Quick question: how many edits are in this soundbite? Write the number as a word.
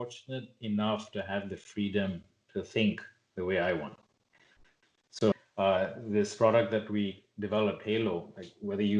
one